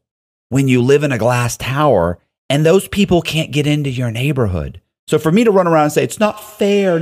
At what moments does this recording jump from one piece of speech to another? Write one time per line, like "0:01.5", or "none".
none